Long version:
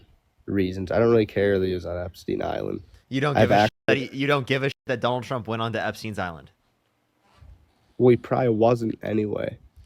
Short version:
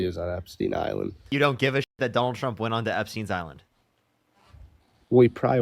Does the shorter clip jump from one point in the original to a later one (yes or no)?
yes